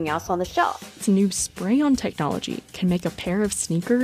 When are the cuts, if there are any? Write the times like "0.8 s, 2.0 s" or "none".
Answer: 1.0 s